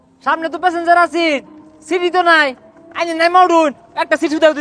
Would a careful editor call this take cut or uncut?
uncut